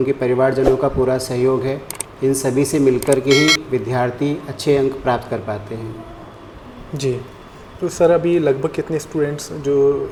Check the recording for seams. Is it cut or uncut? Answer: uncut